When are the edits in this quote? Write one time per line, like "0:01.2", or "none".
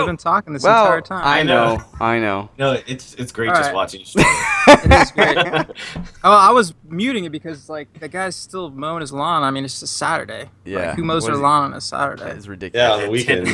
0:09.6